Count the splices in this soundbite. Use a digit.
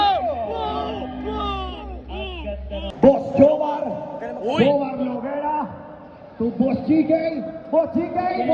1